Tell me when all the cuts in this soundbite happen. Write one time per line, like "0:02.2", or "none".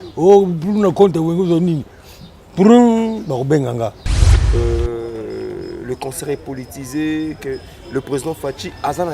0:04.3